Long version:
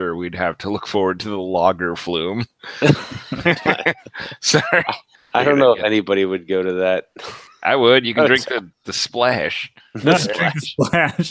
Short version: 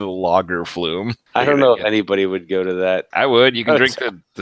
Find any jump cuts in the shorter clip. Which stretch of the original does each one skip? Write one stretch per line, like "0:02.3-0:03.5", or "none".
0:02.5-0:05.2
0:07.1-0:07.6